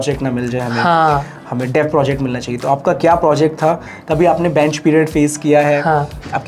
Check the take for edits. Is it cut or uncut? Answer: uncut